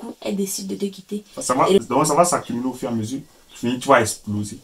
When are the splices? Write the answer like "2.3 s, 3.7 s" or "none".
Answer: 1.8 s